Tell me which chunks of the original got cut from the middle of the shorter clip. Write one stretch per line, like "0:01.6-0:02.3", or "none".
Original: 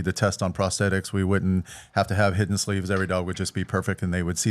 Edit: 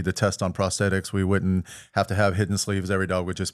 none